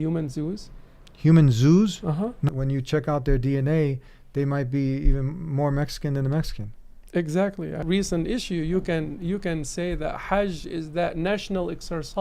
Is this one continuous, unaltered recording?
no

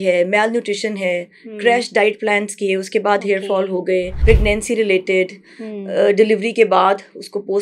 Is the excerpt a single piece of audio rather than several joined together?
no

